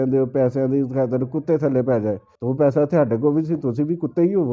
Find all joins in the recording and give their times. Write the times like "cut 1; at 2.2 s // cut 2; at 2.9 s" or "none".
cut 1; at 2.3 s